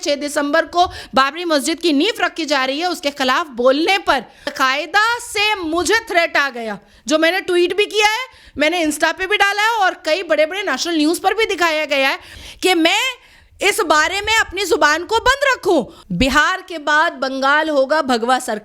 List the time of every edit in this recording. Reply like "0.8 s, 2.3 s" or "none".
15.9 s